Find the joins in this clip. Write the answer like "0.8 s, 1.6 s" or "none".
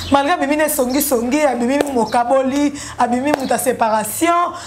none